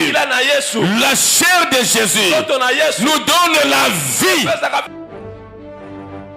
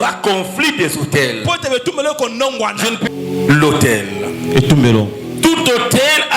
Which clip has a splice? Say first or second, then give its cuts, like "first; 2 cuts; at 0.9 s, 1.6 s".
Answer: second; 1 cut; at 3.1 s